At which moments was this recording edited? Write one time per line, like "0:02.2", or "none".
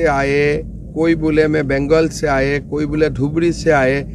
none